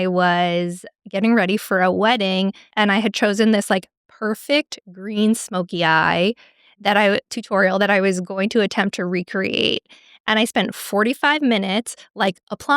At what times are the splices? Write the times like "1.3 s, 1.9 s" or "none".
2.7 s